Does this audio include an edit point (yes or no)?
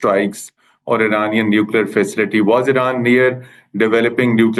no